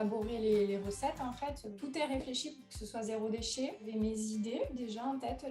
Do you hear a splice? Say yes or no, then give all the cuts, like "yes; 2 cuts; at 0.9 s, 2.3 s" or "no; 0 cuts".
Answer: yes; 2 cuts; at 1.7 s, 3.9 s